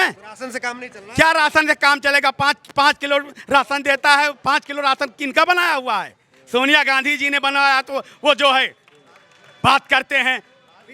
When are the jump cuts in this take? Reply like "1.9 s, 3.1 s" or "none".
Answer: none